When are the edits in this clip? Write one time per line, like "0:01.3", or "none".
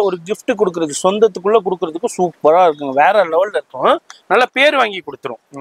none